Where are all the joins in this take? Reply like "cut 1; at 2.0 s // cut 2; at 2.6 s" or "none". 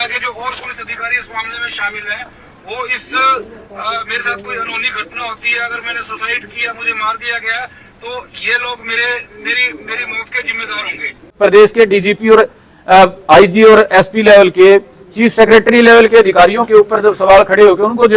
cut 1; at 11.3 s